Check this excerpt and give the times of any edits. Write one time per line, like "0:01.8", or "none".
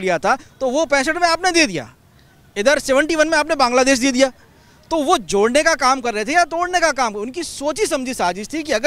none